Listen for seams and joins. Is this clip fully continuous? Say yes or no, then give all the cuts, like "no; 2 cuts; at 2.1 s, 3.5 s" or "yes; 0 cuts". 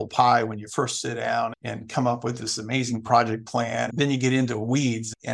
no; 1 cut; at 3.9 s